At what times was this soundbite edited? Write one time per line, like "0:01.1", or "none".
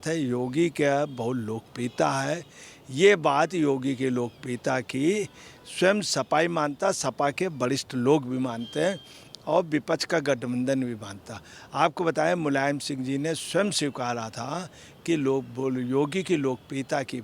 none